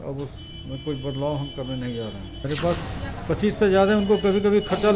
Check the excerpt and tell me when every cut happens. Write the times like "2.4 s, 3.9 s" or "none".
2.3 s